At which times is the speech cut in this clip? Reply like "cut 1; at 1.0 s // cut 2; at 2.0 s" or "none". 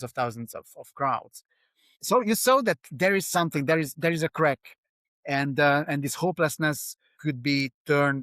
cut 1; at 2.0 s // cut 2; at 7.1 s

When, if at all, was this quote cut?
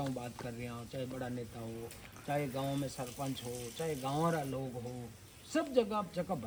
none

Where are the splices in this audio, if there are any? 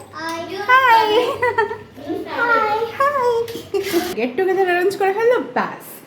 cut 1; at 4.1 s

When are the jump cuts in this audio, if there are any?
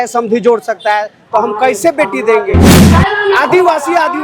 cut 1; at 2.7 s

